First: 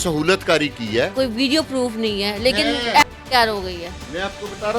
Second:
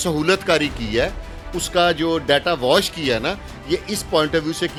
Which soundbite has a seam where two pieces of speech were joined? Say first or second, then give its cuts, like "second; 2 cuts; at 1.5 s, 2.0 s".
first; 1 cut; at 1.1 s